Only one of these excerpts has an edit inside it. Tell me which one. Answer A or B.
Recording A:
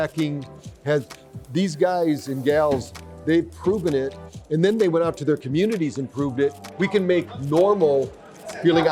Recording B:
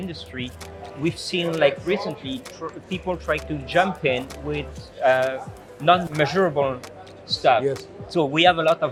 A